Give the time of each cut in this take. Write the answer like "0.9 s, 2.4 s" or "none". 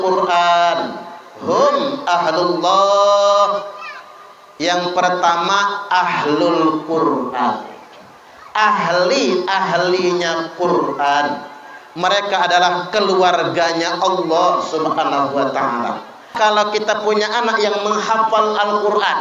16.3 s